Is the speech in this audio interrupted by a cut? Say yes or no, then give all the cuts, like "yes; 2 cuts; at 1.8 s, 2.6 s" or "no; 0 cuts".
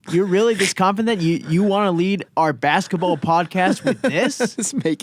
no; 0 cuts